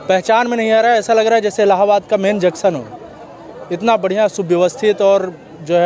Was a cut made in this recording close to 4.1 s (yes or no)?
no